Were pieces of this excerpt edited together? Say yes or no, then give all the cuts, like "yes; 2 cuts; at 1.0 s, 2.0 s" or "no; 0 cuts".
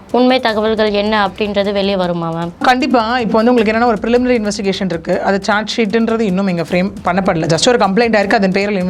yes; 1 cut; at 2.6 s